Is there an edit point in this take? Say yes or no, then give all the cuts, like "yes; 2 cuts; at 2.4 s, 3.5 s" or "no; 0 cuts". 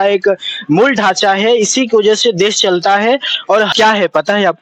yes; 1 cut; at 3.7 s